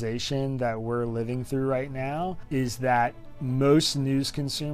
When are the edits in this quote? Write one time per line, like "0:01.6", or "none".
0:02.4